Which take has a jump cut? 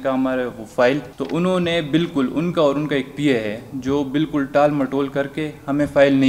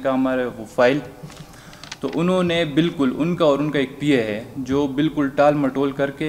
first; 1 cut; at 1.1 s

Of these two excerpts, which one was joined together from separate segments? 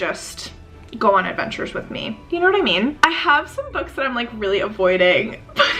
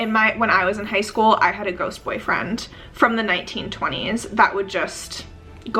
first; 1 cut; at 3.0 s

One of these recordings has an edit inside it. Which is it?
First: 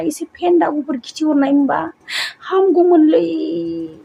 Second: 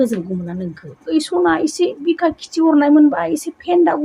second; 1 cut; at 1.1 s

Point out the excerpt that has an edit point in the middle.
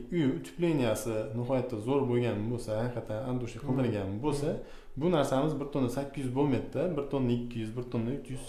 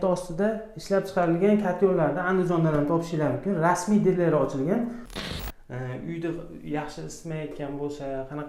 second; 1 cut; at 5.1 s

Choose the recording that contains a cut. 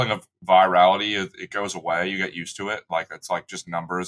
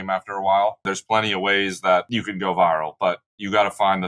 second; 2 cuts; at 0.9 s, 2.1 s

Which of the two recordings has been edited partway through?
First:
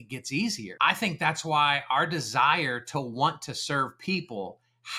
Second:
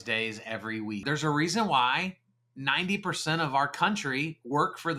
second; 1 cut; at 1.0 s

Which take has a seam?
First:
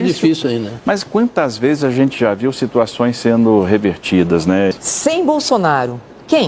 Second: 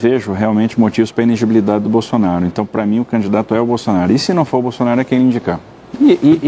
first; 1 cut; at 4.7 s

